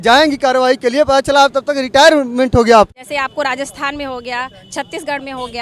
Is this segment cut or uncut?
cut